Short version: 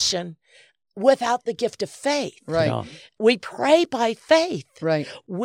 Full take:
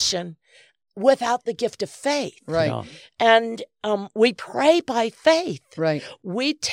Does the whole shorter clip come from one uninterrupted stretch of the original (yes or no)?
no